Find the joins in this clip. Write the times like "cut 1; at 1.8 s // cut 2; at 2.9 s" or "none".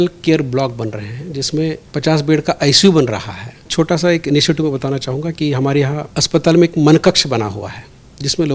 cut 1; at 1.8 s // cut 2; at 3.7 s // cut 3; at 6.1 s